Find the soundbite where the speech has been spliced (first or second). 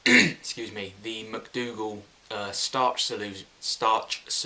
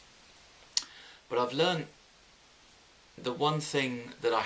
second